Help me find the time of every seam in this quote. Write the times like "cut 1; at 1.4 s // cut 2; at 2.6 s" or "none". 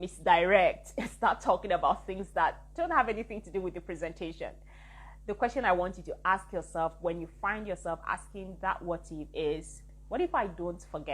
none